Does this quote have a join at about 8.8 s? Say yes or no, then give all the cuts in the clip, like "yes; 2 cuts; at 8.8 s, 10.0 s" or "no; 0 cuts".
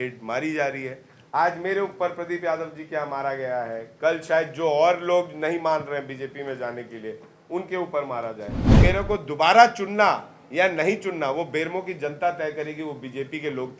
yes; 1 cut; at 8.8 s